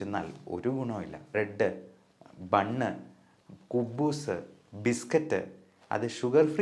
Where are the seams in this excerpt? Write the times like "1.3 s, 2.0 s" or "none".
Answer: 1.3 s